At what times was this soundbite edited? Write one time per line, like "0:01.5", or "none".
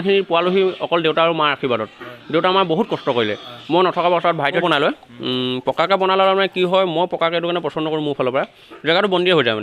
0:04.6